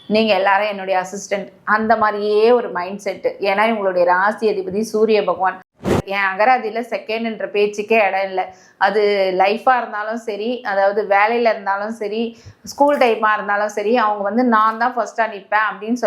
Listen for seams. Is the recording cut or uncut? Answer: cut